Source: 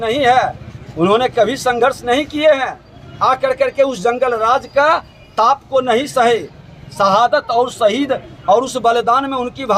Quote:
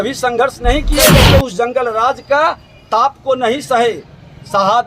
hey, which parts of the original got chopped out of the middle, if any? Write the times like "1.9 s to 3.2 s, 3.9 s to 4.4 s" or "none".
2.4 s to 3.5 s